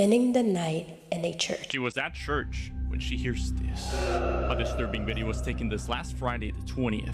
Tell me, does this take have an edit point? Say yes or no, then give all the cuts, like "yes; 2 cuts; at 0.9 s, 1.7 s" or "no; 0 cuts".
yes; 1 cut; at 1.7 s